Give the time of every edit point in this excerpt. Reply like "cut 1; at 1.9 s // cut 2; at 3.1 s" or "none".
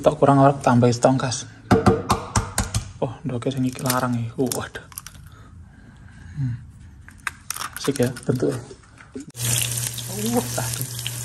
cut 1; at 9.2 s